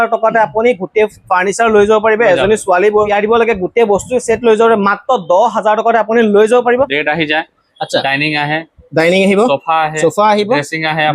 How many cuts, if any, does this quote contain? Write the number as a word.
two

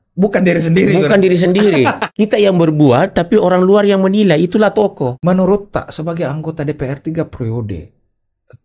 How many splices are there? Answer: two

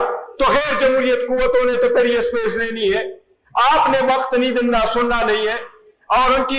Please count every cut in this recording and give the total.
zero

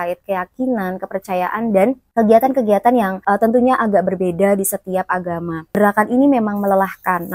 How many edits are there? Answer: one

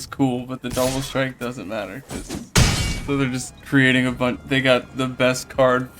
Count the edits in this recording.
one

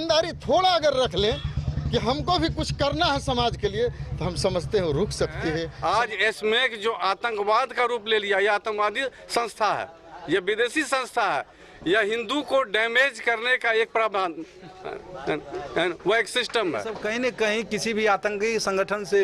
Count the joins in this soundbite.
two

